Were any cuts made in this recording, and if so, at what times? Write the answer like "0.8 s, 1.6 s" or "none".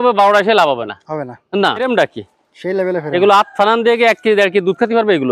1.8 s